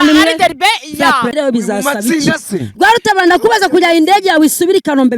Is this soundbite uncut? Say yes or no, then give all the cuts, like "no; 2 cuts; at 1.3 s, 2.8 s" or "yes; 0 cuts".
no; 1 cut; at 1.3 s